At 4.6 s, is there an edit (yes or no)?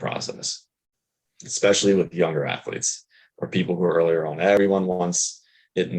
yes